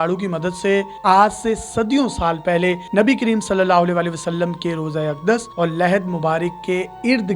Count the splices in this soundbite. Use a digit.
1